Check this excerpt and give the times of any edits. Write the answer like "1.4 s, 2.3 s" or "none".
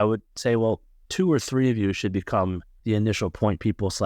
1.0 s, 2.7 s